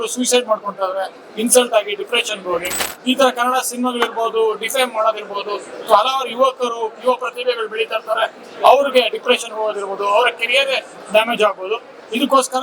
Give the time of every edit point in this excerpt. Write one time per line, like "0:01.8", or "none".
0:02.9